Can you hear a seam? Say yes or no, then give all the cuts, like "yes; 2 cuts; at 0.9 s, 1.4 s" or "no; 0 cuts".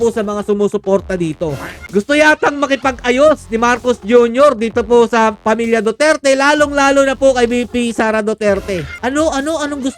yes; 2 cuts; at 1.7 s, 8.9 s